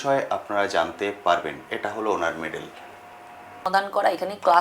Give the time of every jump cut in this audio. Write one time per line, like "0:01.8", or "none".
0:03.6